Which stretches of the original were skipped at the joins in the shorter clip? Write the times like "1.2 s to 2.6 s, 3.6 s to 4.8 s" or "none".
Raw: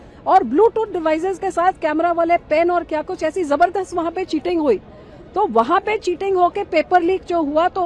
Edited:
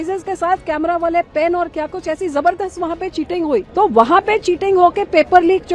4.8 s to 5.3 s

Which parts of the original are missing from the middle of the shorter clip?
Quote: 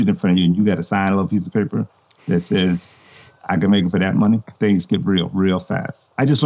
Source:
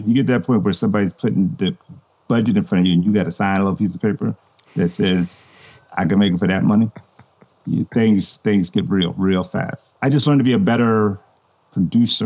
7.0 s to 8.3 s

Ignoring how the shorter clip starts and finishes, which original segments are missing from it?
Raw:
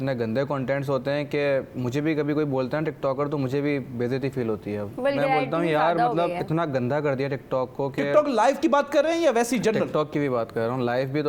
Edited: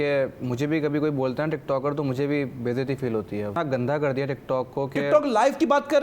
4.9 s to 6.6 s

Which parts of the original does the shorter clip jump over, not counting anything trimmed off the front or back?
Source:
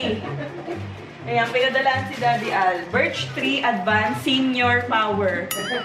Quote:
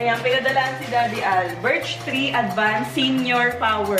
none

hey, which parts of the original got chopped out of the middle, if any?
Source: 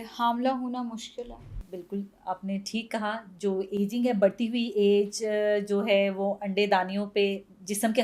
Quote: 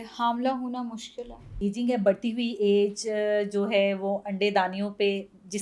1.6 s to 3.7 s

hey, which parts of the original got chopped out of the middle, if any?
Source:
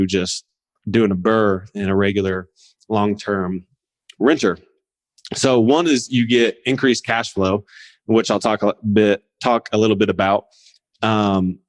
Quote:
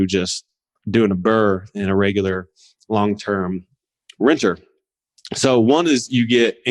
none

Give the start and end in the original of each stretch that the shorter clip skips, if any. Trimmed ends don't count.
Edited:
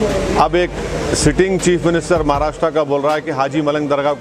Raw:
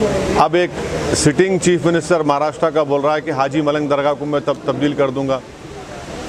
none

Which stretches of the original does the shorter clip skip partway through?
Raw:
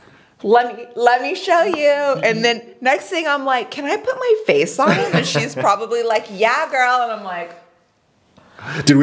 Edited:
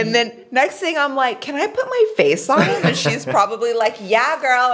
none

